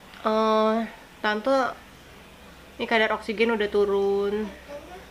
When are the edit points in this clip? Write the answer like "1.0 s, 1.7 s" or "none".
none